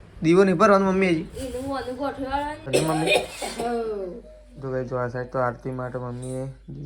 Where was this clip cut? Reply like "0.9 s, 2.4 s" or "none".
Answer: 2.6 s